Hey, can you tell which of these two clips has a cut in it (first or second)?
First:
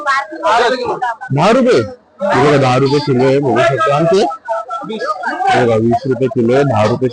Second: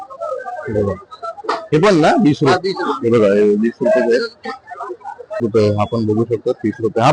second